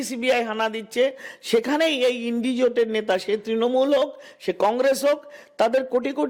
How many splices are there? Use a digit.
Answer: 0